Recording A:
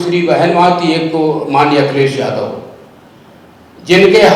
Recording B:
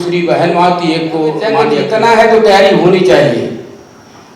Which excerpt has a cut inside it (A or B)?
B